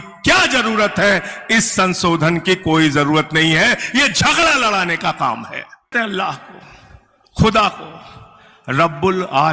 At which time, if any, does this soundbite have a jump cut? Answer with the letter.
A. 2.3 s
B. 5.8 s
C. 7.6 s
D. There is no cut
B